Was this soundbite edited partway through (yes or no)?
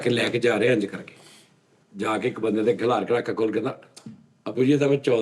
no